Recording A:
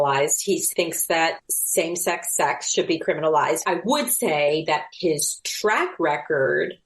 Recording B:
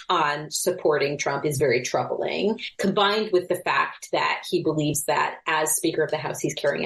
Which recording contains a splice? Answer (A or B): A